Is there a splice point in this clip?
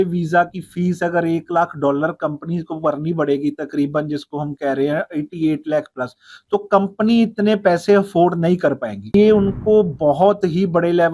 yes; 1 cut; at 9.1 s

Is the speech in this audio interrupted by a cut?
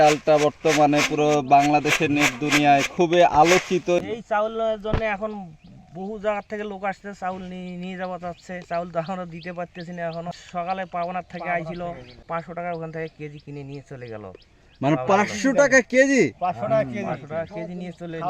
yes; 3 cuts; at 4.0 s, 10.4 s, 12.2 s

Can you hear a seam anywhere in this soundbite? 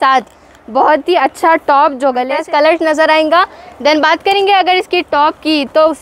yes; 1 cut; at 2.4 s

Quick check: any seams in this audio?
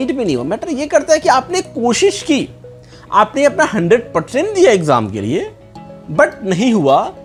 no; 0 cuts

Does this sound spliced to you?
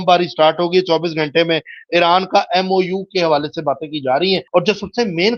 yes; 1 cut; at 4.5 s

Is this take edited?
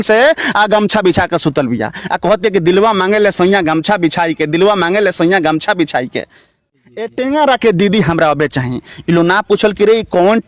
yes; 1 cut; at 6.7 s

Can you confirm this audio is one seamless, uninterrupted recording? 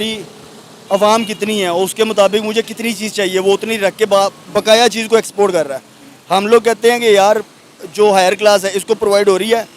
no; 1 cut; at 4.4 s

